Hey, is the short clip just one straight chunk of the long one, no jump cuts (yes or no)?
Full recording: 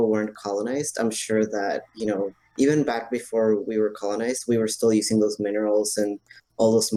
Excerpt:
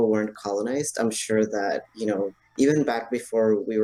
yes